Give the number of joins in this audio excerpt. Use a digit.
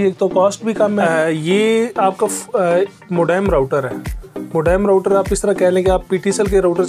1